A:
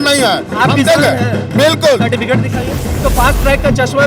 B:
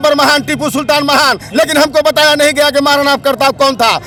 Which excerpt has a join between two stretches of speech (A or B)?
A